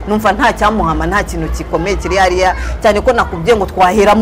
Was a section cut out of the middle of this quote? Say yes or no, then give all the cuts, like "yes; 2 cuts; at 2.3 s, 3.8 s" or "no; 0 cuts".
no; 0 cuts